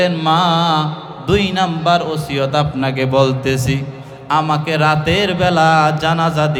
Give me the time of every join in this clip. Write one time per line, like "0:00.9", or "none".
none